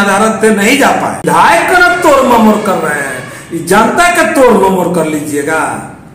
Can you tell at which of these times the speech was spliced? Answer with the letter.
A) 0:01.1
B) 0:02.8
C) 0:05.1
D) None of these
A